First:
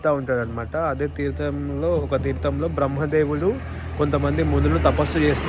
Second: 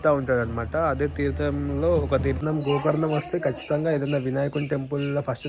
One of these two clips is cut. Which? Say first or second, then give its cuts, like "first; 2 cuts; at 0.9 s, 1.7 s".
second; 1 cut; at 2.4 s